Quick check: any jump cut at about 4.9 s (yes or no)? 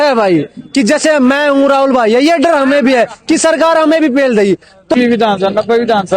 yes